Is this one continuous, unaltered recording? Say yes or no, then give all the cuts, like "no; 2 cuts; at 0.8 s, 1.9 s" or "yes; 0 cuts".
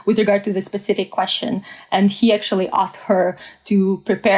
yes; 0 cuts